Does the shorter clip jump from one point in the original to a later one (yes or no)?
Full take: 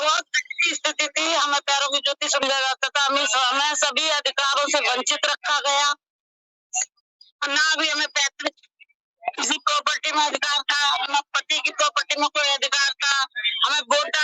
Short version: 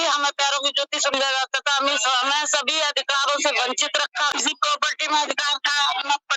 yes